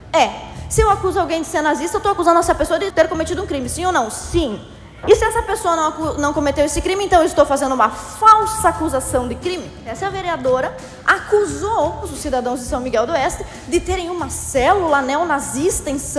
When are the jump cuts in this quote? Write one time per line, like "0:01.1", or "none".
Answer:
0:02.9
0:09.9
0:12.0